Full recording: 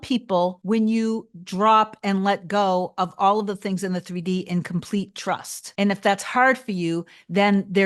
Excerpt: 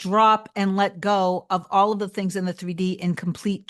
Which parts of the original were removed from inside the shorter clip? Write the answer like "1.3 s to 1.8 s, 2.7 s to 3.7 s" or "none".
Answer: none